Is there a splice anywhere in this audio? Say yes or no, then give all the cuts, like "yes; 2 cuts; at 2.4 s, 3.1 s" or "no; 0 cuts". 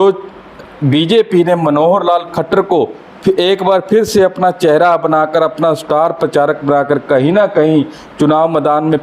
no; 0 cuts